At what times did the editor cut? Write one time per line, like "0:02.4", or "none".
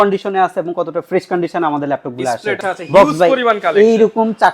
0:02.6